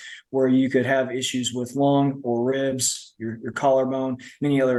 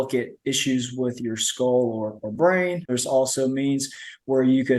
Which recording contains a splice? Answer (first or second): second